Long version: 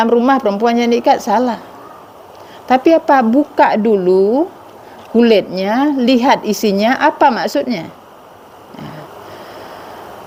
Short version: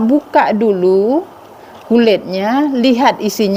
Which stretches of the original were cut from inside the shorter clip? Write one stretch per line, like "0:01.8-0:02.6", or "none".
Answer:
none